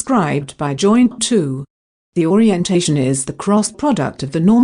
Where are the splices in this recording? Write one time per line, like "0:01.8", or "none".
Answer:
0:01.0